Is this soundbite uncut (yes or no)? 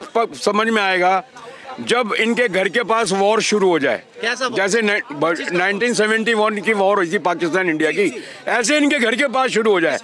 yes